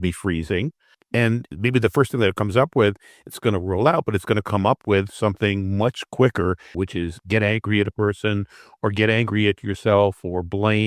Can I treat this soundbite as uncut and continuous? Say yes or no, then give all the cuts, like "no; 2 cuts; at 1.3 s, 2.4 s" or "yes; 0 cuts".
no; 2 cuts; at 1.2 s, 6.7 s